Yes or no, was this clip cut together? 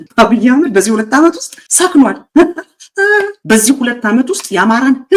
no